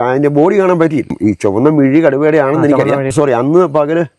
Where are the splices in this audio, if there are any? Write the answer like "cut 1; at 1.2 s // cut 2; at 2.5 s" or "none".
cut 1; at 1.1 s // cut 2; at 3.1 s